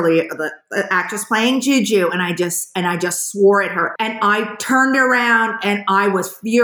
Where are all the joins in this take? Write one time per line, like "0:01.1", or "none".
0:03.8